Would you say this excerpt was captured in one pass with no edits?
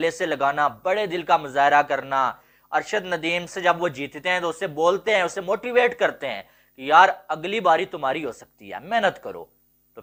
yes; 0 cuts

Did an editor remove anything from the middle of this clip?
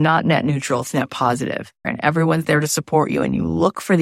yes; 1 cut; at 1.9 s

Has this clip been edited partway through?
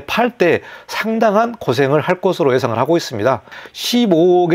yes; 1 cut; at 3.5 s

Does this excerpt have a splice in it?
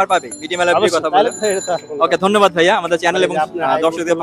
no; 0 cuts

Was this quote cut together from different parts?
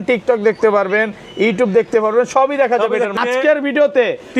yes; 1 cut; at 3.1 s

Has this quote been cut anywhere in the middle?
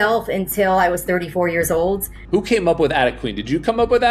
yes; 1 cut; at 2.1 s

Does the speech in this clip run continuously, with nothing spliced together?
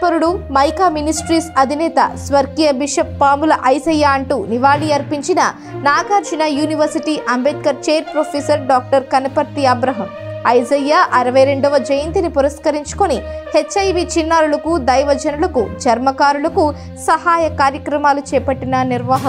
yes; 0 cuts

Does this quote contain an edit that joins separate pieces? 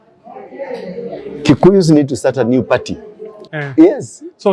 yes; 1 cut; at 3.4 s

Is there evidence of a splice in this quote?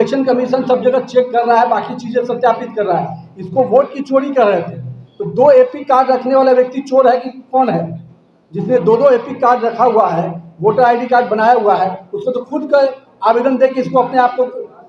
no; 0 cuts

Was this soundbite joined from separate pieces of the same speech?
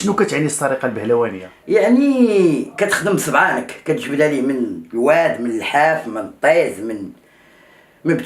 yes; 1 cut; at 1.5 s

